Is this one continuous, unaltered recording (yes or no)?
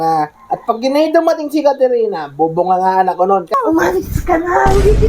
no